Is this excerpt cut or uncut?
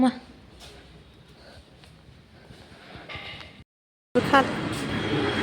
cut